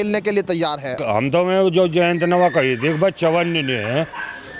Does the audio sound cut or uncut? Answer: cut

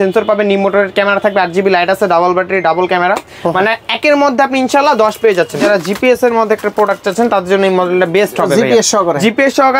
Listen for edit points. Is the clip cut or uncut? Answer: cut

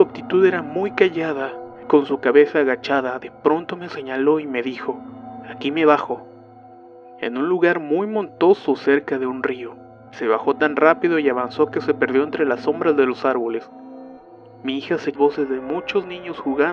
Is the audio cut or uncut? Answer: uncut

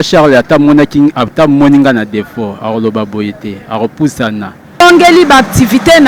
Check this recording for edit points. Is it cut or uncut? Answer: cut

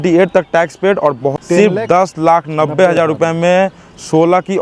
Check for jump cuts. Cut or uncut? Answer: cut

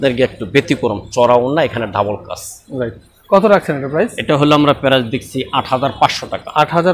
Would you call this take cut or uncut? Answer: uncut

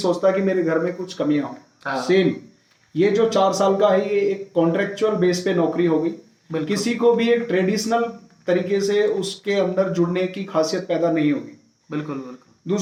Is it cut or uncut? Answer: uncut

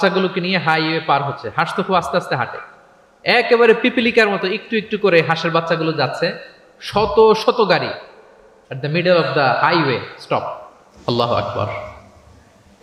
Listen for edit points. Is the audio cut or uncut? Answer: uncut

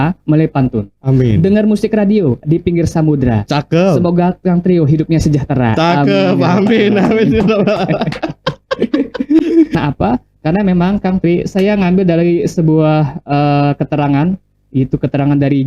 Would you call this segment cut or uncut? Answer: cut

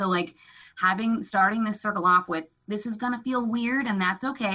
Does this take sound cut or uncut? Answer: uncut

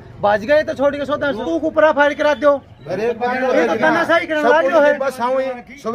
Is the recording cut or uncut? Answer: cut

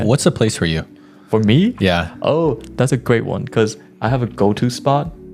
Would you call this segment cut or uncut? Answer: uncut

